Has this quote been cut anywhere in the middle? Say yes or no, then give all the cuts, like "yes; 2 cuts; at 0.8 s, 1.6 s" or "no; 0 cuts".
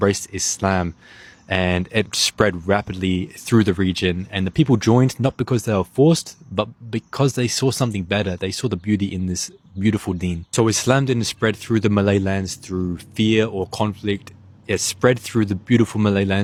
no; 0 cuts